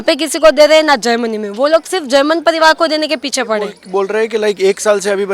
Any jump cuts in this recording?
yes; 1 cut; at 3.8 s

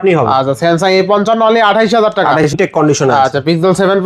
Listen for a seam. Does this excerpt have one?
yes; 1 cut; at 2.5 s

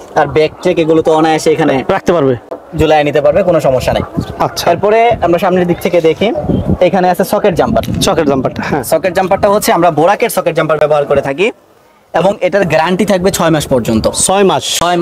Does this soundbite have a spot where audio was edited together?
no; 0 cuts

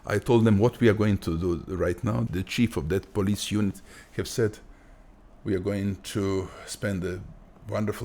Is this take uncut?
no; 1 cut; at 2.3 s

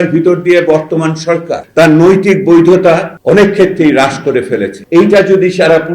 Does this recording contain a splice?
yes; 3 cuts; at 1.6 s, 3.1 s, 4.8 s

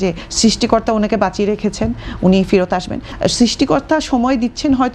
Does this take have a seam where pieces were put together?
yes; 1 cut; at 3.1 s

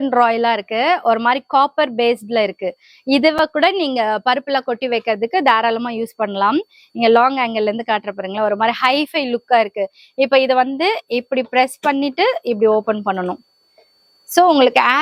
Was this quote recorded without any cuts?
yes; 0 cuts

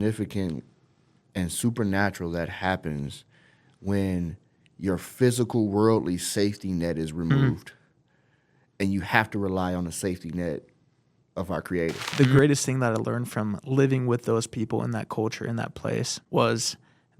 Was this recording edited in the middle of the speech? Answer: yes; 2 cuts; at 12.1 s, 16.2 s

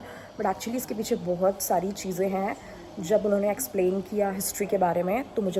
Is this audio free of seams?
yes; 0 cuts

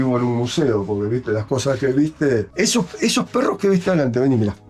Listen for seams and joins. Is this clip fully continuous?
yes; 0 cuts

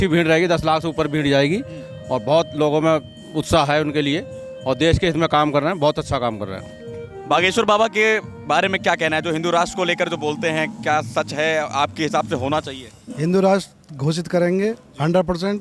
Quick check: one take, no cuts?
yes; 0 cuts

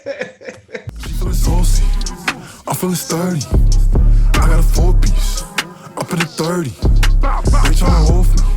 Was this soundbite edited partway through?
yes; 1 cut; at 1.0 s

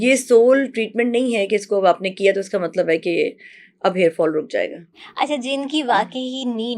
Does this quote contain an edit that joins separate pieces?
no; 0 cuts

